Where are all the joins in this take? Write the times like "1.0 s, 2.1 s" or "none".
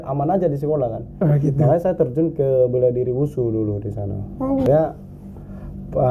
4.7 s